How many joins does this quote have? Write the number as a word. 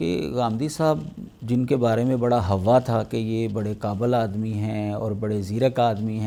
zero